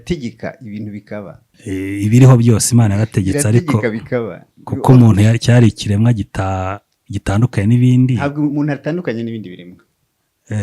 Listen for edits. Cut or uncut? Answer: cut